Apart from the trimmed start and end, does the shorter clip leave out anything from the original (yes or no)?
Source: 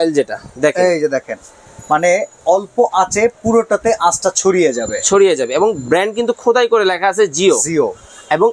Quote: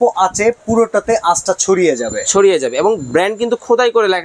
no